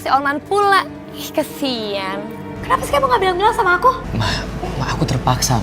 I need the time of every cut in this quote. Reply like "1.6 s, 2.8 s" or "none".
2.5 s